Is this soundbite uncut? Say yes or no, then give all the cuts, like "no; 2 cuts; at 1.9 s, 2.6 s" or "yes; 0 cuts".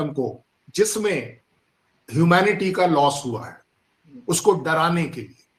yes; 0 cuts